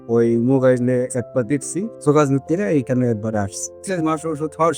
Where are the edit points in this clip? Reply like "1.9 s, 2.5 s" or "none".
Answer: 1.9 s, 3.8 s